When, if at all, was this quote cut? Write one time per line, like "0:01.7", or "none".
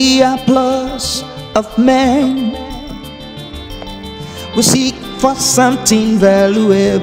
none